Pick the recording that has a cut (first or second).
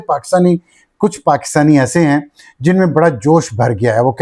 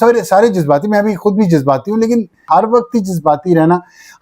second